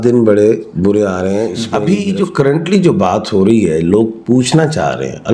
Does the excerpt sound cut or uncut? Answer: cut